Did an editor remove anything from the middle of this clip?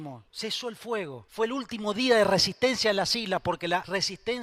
no; 0 cuts

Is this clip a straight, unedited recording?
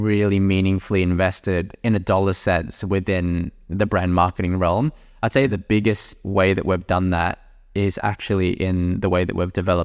no; 1 cut; at 5.5 s

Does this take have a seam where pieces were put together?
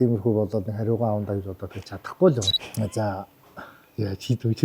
yes; 1 cut; at 2.6 s

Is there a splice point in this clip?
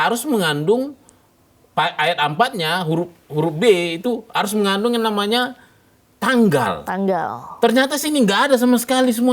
no; 0 cuts

